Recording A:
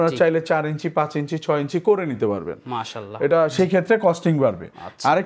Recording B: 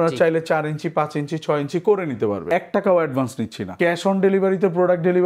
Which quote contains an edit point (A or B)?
B